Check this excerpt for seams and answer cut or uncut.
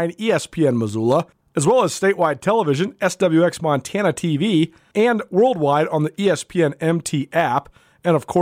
cut